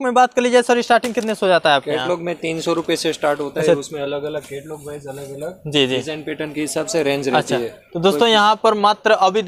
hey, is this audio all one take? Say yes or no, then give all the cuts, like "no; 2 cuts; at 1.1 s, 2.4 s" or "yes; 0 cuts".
yes; 0 cuts